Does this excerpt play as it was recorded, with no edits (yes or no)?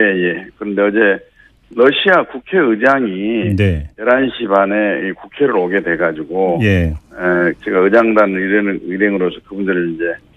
no